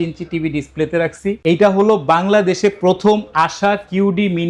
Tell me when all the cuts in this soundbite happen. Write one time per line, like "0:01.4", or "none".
0:01.4

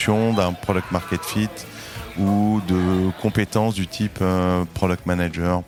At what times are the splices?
none

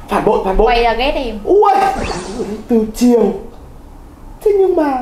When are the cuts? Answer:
0:02.0

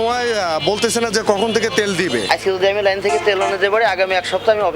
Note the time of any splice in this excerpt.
0:02.2

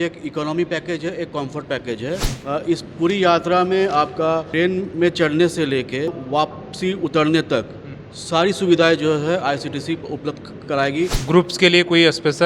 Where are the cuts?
0:02.3
0:04.5
0:06.2
0:11.2

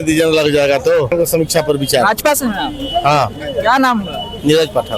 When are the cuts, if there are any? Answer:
0:01.1

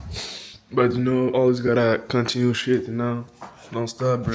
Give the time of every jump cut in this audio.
none

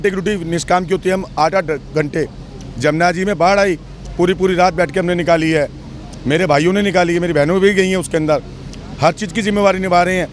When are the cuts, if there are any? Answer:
none

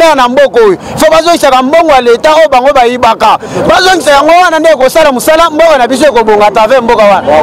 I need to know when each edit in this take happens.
none

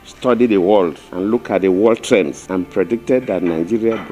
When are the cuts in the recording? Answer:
0:01.1
0:02.4

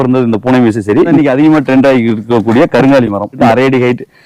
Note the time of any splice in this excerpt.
0:01.2
0:03.4

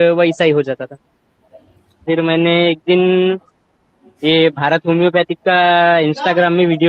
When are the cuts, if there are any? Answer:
0:02.0

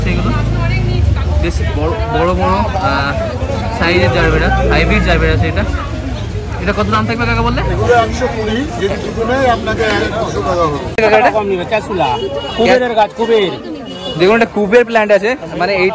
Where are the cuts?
none

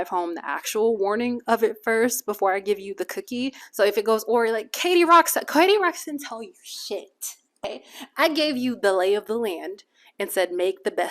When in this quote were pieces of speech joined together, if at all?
0:03.6
0:07.6

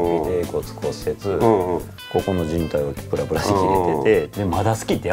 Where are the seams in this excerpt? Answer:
0:02.0
0:04.3

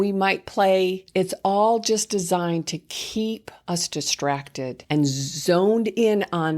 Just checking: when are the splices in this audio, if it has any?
0:01.0
0:04.8

